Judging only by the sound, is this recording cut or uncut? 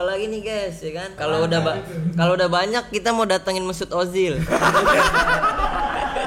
cut